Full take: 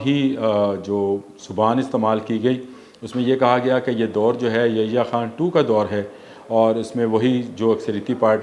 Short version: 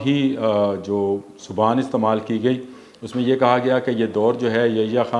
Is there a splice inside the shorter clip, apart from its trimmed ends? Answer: no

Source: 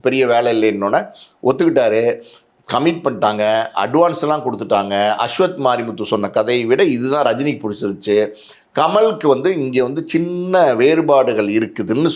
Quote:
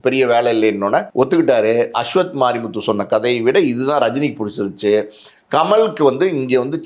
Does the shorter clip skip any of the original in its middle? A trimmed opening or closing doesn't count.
yes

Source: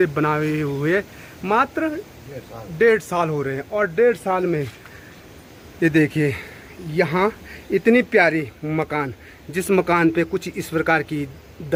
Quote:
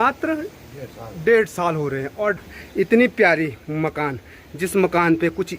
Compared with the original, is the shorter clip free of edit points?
no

